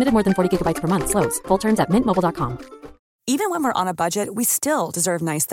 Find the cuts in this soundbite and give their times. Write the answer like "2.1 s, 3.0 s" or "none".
3.1 s